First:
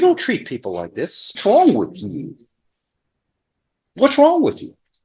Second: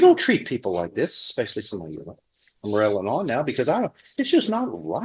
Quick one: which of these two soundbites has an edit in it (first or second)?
first